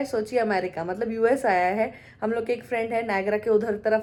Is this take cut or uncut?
uncut